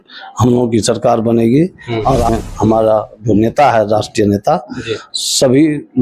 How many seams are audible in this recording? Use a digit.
1